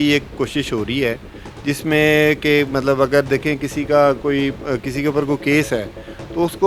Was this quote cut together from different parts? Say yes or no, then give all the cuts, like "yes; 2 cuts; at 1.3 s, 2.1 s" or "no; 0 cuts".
no; 0 cuts